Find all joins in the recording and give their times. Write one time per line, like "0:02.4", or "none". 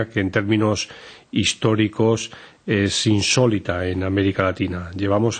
0:01.2

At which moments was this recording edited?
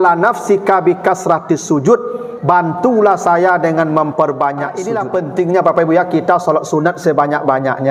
0:04.9

